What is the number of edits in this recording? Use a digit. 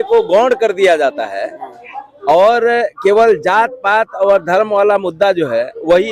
0